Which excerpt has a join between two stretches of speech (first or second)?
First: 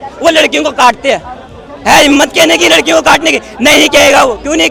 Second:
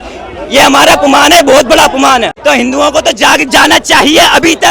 second